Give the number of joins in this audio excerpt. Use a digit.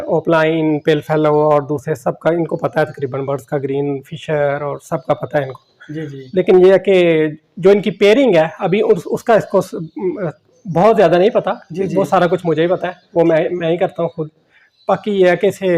0